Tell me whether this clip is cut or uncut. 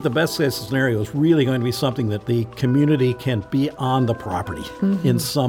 cut